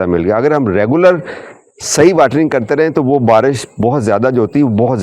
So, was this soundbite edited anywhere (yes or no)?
no